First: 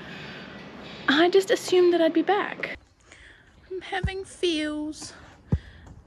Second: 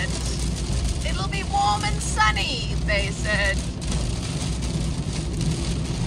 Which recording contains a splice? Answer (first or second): first